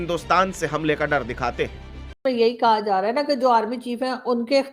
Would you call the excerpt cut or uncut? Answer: cut